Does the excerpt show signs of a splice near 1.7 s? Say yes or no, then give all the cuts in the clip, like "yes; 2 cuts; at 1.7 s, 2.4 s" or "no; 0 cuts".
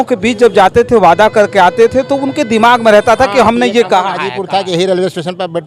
no; 1 cut; at 4.3 s